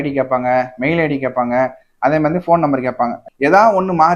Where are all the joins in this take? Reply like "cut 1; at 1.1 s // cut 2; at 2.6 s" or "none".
cut 1; at 3.2 s